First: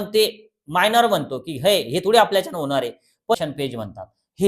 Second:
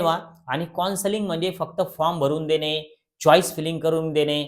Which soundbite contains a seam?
first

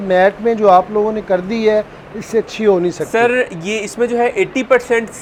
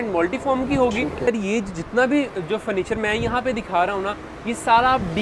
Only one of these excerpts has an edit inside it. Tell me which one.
second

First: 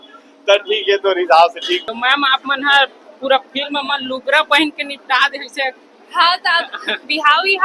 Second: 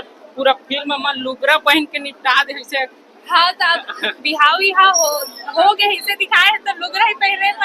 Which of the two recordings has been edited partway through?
first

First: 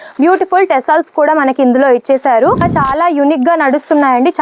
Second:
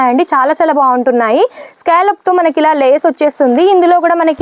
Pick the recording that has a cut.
first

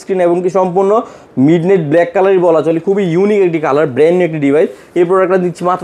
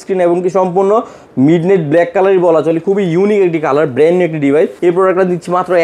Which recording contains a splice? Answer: second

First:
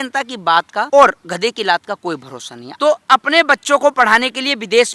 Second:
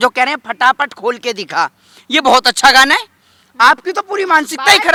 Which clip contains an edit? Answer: first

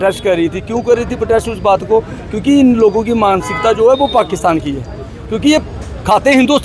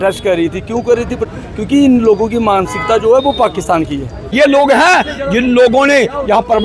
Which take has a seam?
second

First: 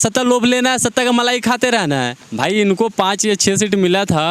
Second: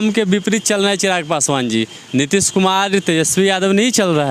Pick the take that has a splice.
first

